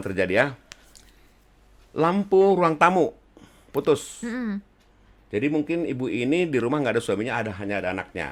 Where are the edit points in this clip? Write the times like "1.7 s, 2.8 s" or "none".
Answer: none